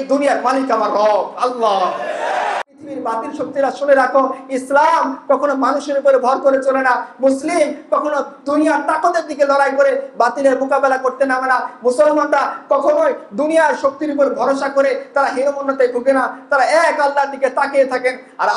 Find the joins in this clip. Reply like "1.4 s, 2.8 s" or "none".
2.7 s